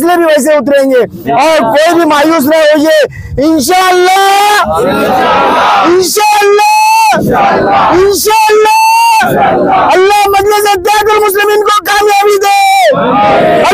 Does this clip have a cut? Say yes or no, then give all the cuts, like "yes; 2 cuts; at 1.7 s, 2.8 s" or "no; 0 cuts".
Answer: no; 0 cuts